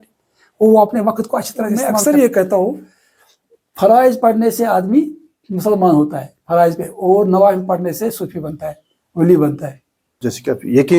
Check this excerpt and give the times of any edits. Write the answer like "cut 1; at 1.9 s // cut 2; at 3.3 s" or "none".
cut 1; at 2.0 s // cut 2; at 9.6 s